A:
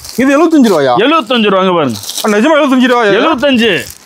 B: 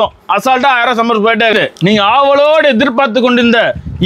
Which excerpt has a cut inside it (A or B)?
B